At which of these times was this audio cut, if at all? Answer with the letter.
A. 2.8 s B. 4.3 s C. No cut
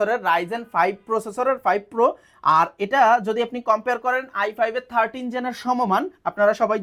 C